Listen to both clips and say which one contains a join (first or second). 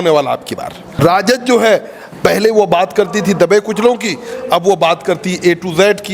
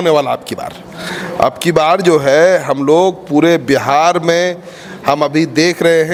first